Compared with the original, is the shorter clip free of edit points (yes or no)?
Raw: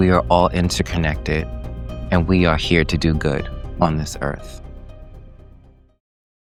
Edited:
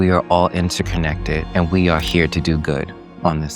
no